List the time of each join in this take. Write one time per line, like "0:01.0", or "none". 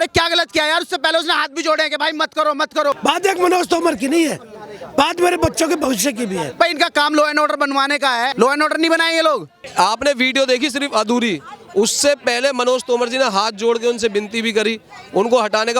0:03.0
0:06.5
0:08.3
0:09.6